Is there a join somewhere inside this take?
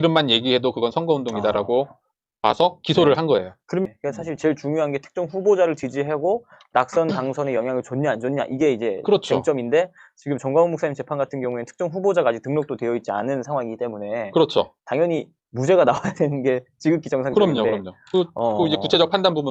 yes; 1 cut; at 3.9 s

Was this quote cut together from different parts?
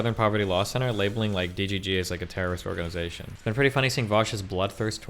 yes; 1 cut; at 3.2 s

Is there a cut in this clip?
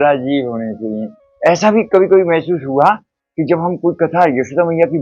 yes; 1 cut; at 1.2 s

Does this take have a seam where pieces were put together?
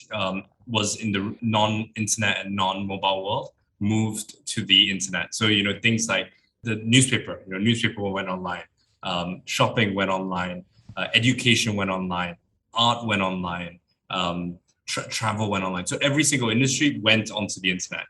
yes; 2 cuts; at 1.4 s, 6.6 s

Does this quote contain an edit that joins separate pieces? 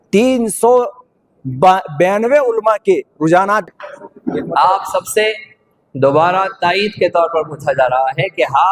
yes; 1 cut; at 3.6 s

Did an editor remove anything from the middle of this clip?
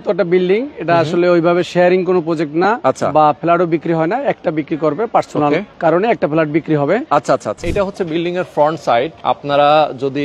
yes; 3 cuts; at 5.7 s, 7.6 s, 9.1 s

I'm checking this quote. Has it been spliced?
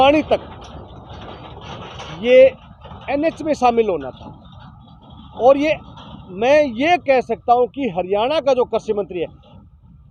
no; 0 cuts

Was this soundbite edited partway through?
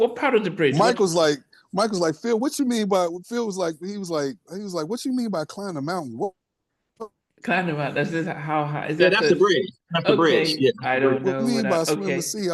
no; 0 cuts

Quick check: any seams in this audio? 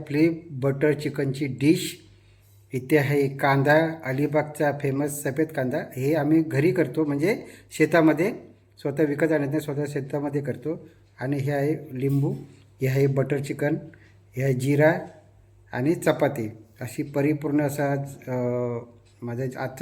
no; 0 cuts

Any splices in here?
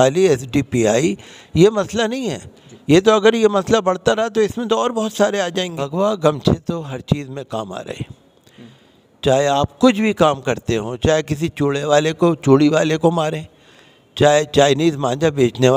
yes; 1 cut; at 5.9 s

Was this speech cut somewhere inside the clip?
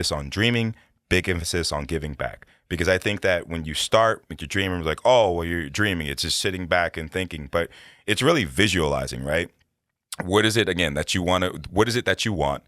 no; 0 cuts

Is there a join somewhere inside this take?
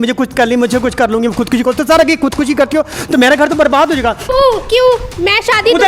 yes; 1 cut; at 4.3 s

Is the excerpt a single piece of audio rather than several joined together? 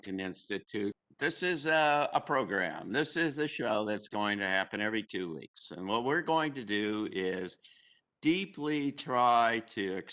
no; 1 cut; at 1.0 s

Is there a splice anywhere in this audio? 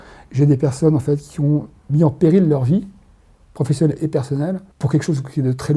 yes; 2 cuts; at 1.8 s, 4.7 s

